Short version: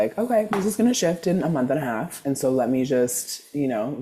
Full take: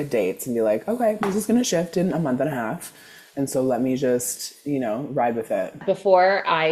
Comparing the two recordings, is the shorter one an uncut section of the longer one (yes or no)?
no